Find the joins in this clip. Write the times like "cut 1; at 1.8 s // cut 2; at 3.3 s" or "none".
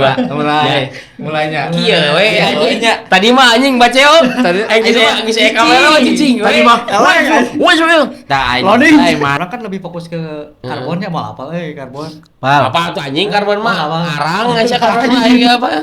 cut 1; at 9.4 s